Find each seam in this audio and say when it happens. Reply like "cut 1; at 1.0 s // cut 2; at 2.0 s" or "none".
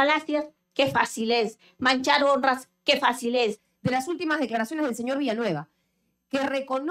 cut 1; at 3.7 s